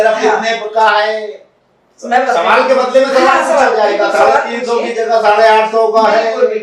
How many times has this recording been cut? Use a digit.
0